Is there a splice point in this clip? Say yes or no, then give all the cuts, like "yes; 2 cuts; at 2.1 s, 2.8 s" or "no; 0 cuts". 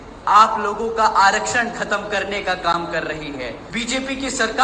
yes; 1 cut; at 3.6 s